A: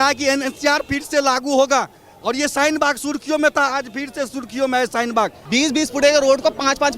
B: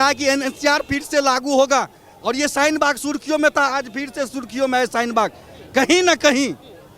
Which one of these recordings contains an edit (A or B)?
A